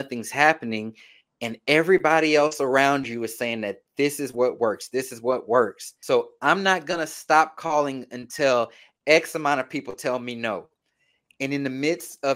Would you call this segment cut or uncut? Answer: cut